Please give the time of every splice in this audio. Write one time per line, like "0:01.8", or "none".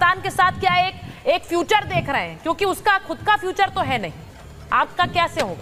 none

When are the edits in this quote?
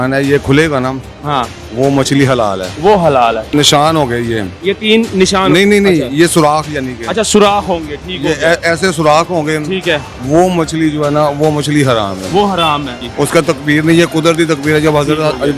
0:03.4
0:13.0

